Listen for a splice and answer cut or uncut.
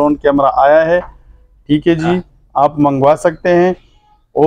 uncut